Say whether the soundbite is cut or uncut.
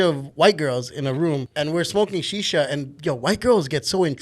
cut